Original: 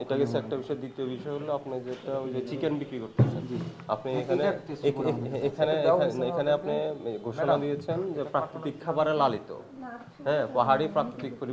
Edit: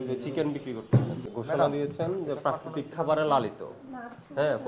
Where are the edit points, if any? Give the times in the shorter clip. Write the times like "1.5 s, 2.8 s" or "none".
1.2 s